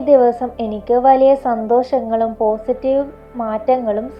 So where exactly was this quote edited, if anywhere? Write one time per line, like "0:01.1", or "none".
none